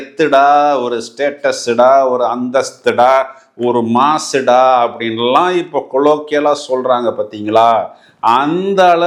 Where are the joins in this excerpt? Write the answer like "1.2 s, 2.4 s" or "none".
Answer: none